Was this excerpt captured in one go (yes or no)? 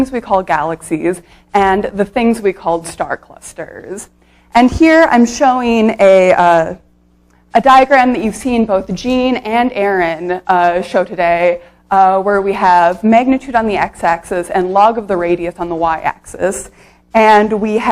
no